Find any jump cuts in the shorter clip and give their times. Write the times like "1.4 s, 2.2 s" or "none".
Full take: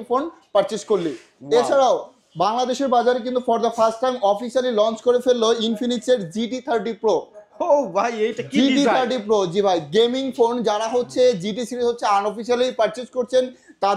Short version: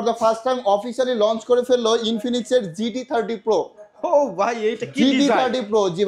none